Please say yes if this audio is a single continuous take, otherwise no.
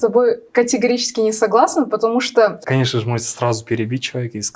no